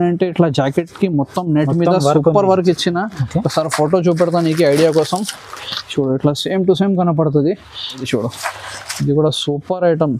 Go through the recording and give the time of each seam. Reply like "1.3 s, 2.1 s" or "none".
8.1 s